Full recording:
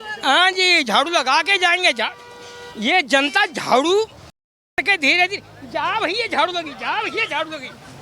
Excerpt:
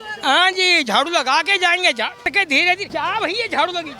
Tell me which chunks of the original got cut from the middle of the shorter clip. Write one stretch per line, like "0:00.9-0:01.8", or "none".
0:02.6-0:05.4